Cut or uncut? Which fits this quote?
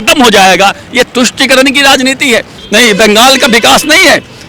cut